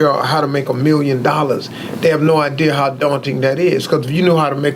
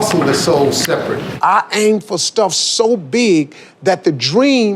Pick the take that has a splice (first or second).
second